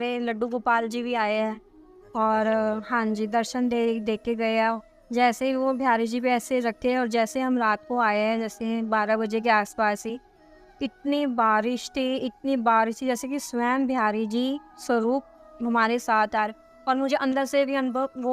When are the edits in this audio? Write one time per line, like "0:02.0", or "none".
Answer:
0:04.8